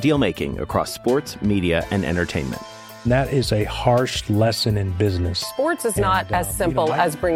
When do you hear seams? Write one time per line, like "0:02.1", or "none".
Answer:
none